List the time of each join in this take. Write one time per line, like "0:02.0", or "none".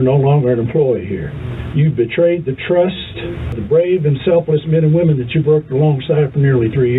0:01.3
0:03.6